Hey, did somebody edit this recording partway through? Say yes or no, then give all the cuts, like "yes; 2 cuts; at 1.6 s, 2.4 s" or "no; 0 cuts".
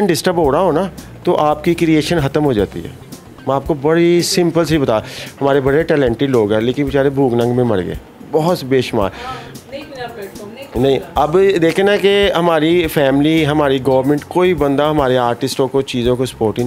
no; 0 cuts